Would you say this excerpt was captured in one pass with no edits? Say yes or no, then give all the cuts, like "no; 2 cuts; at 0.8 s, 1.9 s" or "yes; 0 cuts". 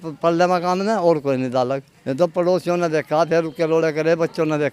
no; 1 cut; at 1.9 s